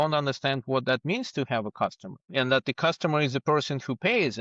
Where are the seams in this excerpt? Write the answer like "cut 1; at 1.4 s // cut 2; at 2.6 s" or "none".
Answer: none

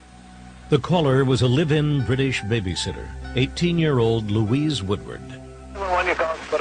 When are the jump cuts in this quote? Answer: none

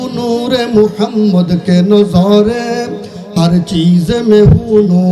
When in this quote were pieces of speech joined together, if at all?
none

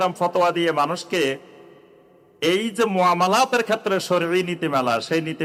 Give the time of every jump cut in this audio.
none

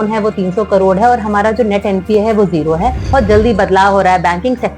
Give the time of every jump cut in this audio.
cut 1; at 3.0 s

